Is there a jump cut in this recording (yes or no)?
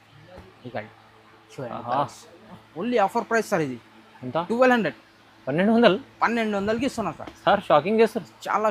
yes